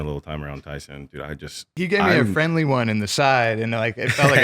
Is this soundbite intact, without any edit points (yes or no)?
no